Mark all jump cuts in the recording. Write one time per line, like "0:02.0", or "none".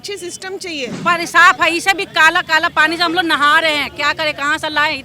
0:01.0